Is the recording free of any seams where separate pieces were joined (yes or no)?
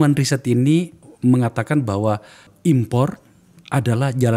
no